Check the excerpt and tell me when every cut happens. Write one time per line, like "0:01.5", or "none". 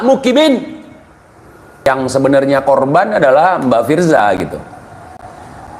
0:01.9